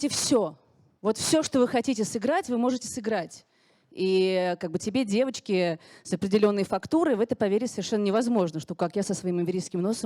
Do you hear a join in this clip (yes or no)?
no